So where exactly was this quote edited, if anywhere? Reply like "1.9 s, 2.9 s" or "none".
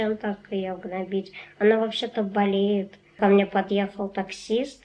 3.1 s